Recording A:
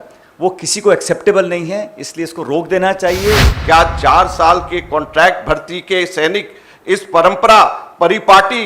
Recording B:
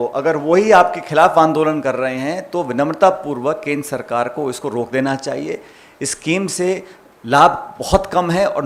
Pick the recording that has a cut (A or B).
A